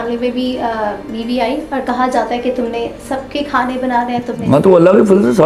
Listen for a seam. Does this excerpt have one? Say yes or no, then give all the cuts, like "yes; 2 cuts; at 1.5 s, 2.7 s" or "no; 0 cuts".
no; 0 cuts